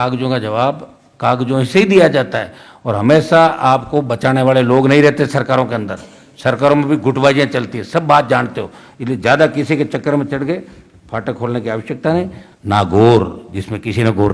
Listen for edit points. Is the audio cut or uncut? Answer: cut